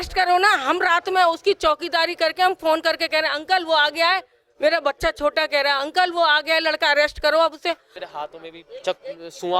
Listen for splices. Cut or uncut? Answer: cut